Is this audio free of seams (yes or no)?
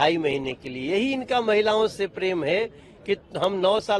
yes